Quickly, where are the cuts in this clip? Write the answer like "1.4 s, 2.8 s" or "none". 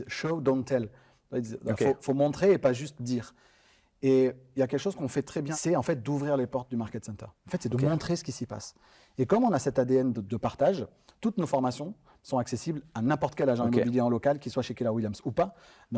5.5 s